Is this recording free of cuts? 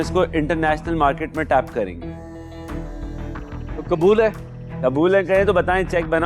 yes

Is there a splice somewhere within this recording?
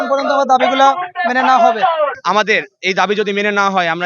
yes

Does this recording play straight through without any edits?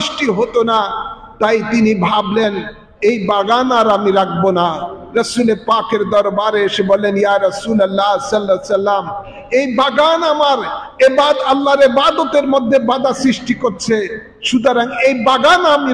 yes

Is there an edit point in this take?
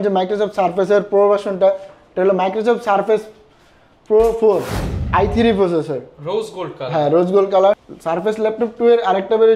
yes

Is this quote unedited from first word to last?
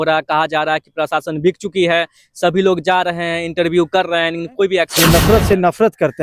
no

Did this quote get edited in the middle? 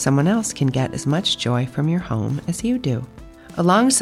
no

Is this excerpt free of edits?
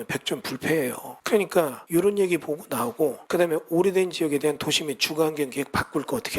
no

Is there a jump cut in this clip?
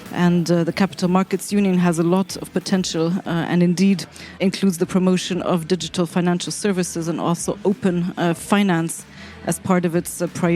yes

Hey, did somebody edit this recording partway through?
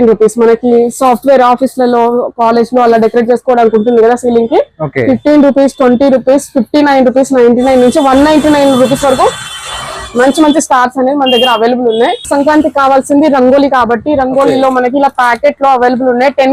yes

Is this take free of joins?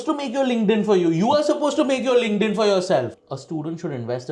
no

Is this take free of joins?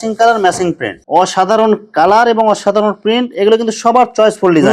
no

